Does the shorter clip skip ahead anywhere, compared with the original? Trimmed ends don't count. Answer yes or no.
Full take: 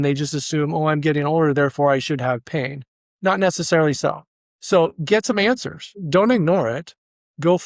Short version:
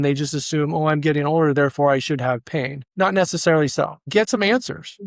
yes